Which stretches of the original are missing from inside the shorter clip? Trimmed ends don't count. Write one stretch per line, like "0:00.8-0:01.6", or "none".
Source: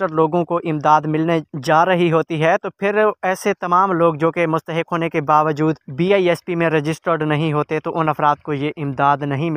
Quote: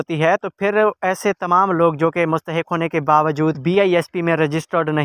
0:05.8-0:05.9